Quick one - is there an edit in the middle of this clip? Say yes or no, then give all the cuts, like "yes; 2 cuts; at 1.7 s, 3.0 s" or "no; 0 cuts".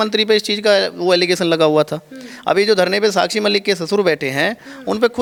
no; 0 cuts